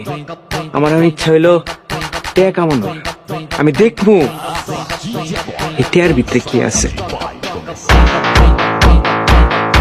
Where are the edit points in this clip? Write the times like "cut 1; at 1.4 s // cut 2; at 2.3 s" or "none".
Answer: none